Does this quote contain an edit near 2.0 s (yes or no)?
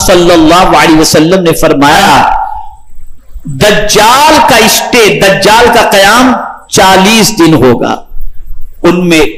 yes